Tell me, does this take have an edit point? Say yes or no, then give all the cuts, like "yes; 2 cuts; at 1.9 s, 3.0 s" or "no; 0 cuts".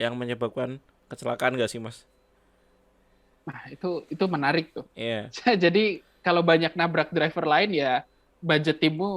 no; 0 cuts